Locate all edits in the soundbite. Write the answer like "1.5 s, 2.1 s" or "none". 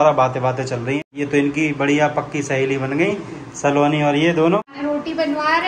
1.0 s, 4.7 s